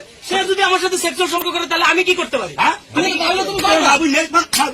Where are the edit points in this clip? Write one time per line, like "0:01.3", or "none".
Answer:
0:01.4